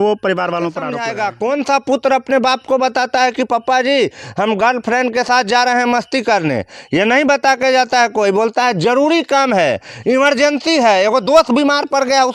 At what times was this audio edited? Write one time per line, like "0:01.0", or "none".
0:01.0